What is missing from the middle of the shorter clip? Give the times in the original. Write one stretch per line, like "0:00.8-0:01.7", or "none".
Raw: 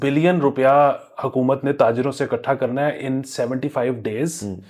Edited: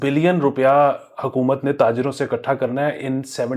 none